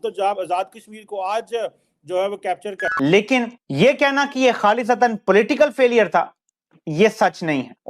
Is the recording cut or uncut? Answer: cut